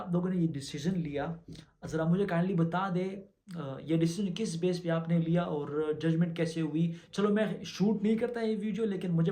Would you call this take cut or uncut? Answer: uncut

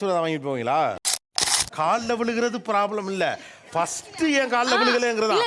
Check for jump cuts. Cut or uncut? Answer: cut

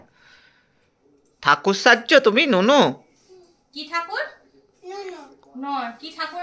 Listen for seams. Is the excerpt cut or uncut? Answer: uncut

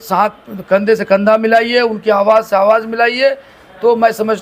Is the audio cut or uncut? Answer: uncut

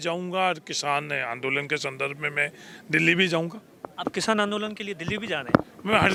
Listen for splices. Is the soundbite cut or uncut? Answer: uncut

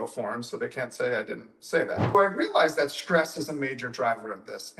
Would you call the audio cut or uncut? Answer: cut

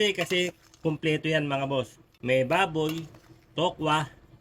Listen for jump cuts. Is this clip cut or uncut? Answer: uncut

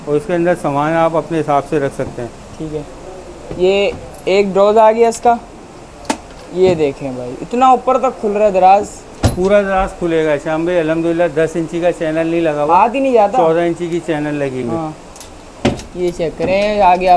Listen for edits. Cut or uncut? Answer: uncut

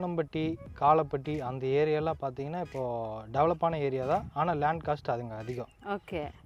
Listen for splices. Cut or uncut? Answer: uncut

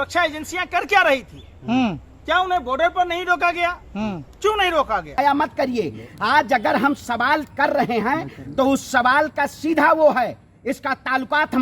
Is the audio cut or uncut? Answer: cut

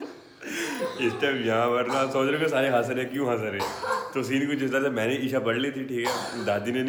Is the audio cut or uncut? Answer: uncut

